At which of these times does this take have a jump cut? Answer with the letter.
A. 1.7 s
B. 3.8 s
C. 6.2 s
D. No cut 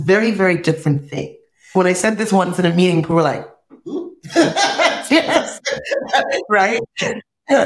A